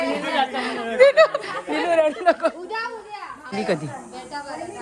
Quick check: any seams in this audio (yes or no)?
yes